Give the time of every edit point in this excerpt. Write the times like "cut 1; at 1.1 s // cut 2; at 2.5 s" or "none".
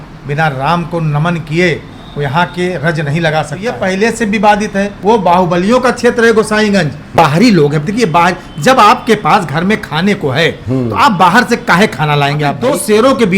cut 1; at 3.8 s // cut 2; at 4.9 s // cut 3; at 7.2 s // cut 4; at 12.6 s